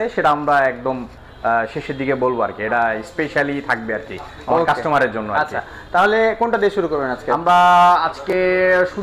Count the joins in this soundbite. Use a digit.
0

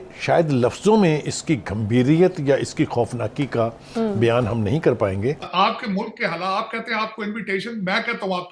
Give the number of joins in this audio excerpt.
1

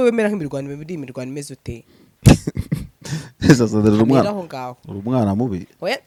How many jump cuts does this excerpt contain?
0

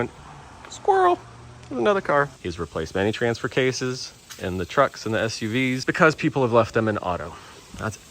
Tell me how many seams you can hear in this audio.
2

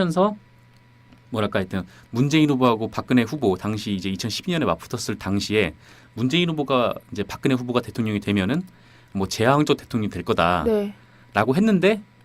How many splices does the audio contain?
1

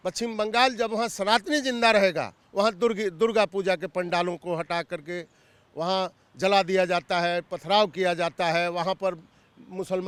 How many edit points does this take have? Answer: 0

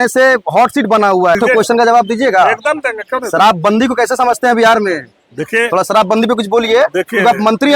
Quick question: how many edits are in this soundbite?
1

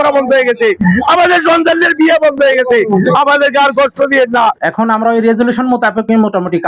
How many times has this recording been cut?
1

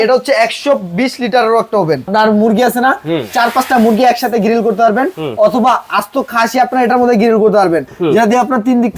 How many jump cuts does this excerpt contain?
2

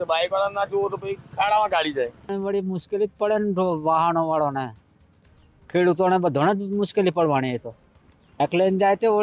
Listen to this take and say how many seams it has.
0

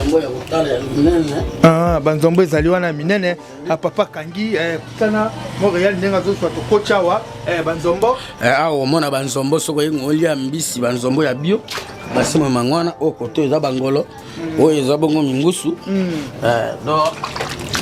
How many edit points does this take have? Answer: 0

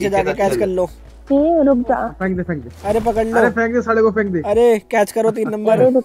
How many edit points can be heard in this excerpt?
1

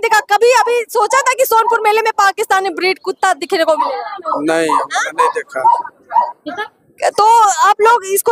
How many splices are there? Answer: 0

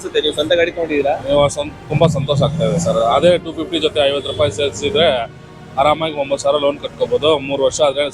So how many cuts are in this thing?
0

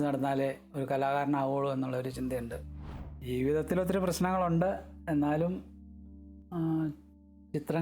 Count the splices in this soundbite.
1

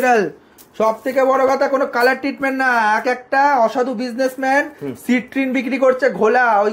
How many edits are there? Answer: 0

